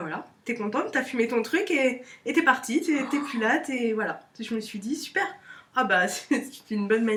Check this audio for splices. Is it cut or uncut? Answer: uncut